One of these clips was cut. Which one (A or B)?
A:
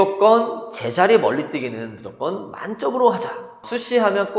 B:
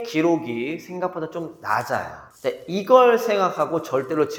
A